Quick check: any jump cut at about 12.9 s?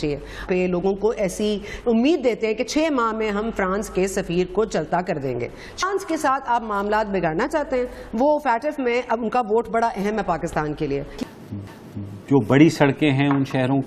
no; 1 cut; at 11.1 s

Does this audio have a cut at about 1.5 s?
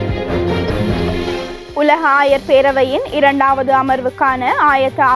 yes; 1 cut; at 1.5 s

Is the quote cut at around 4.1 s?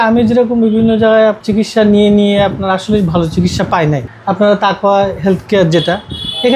yes; 2 cuts; at 1.4 s, 4.1 s

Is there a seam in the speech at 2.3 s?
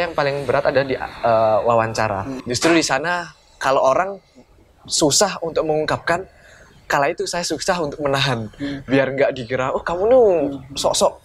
yes; 1 cut; at 2.3 s

